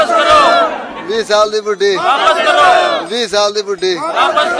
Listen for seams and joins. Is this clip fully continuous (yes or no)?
yes